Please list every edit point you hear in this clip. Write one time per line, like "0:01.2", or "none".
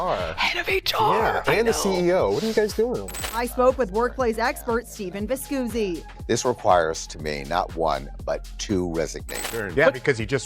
0:03.1
0:09.2

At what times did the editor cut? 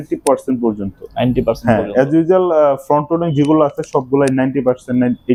none

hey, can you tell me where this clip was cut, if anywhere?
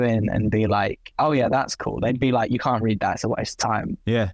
0:01.0

